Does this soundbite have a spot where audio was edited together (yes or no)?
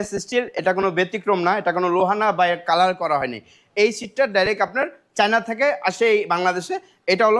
no